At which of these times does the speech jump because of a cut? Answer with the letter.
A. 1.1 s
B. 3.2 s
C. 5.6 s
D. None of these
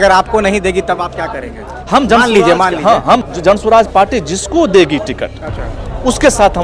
B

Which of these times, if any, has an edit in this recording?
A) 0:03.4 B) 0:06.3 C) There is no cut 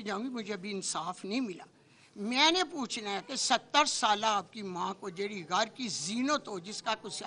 C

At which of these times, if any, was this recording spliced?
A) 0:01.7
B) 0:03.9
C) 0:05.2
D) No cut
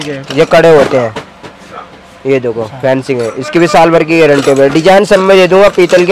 D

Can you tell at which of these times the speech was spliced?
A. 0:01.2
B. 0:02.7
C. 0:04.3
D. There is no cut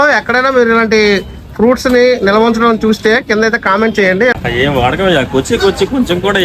C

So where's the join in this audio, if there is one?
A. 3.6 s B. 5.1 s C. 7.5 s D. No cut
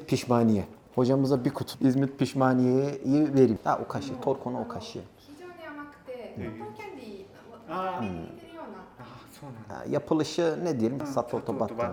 D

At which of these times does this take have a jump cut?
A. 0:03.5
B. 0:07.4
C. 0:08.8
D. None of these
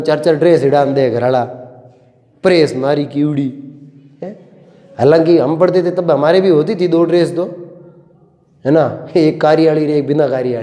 D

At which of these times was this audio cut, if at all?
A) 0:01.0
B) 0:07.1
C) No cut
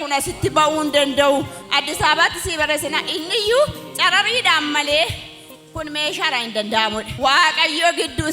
B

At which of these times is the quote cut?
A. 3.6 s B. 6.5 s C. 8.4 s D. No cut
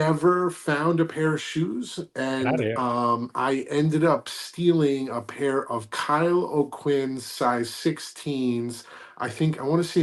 D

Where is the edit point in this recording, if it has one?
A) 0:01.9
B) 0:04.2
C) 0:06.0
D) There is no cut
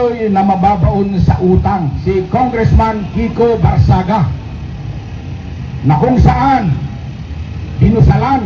A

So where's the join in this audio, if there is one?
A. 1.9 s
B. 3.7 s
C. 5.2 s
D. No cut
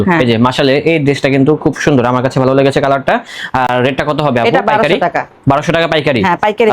D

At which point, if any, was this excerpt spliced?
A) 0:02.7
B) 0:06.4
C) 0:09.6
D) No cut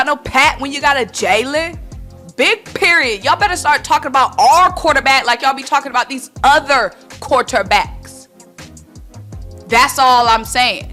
D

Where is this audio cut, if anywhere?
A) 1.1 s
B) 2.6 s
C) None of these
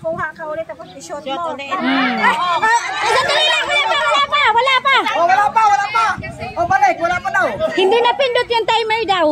B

